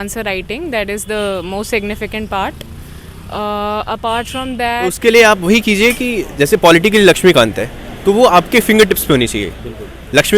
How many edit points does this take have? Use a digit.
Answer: 1